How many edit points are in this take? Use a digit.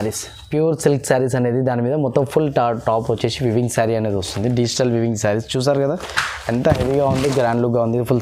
0